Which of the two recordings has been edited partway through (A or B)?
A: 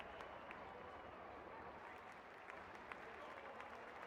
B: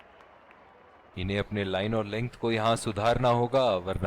B